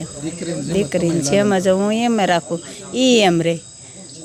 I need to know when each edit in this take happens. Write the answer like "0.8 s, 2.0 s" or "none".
none

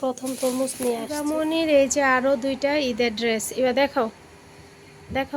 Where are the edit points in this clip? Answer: 1.1 s

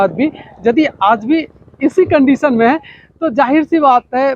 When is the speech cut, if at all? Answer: none

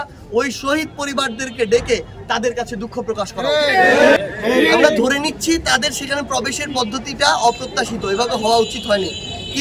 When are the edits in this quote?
4.3 s

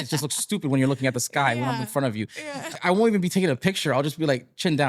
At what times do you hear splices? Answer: 2.7 s

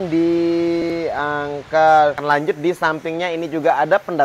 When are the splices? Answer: 2.2 s

